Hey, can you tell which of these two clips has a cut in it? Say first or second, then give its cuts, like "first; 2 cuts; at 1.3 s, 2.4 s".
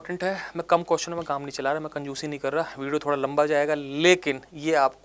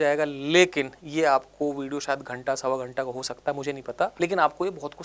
second; 1 cut; at 4.1 s